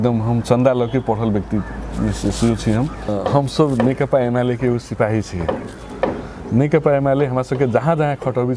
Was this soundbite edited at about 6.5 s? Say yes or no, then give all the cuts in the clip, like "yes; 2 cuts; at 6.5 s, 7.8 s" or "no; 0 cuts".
no; 1 cut; at 3.1 s